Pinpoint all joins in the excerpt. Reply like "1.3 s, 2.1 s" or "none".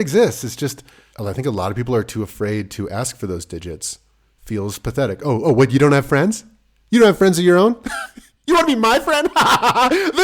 none

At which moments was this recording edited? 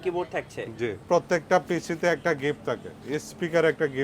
1.1 s

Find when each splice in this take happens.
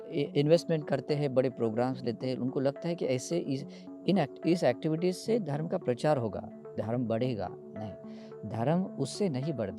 none

